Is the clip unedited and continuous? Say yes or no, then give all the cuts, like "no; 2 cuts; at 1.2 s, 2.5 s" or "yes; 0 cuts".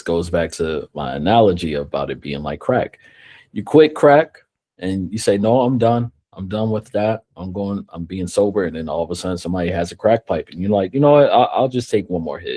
yes; 0 cuts